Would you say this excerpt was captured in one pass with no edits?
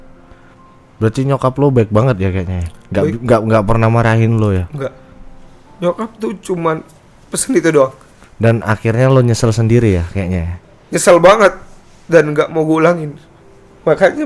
yes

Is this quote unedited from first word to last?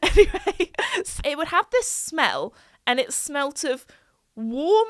no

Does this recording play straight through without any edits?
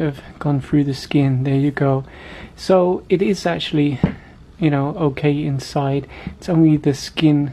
yes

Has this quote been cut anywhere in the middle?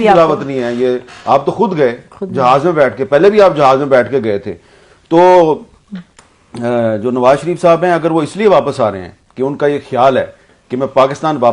no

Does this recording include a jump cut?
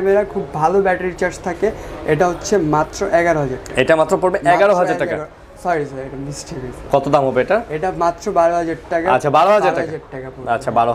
no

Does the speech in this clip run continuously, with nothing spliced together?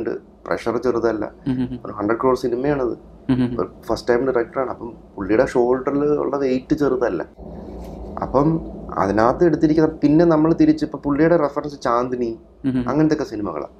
yes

